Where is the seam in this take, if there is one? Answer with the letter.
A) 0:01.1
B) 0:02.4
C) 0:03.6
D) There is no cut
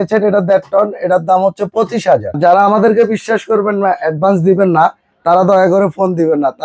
B